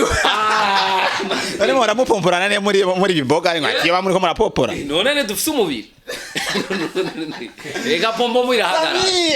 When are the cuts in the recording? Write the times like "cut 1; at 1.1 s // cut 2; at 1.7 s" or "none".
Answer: none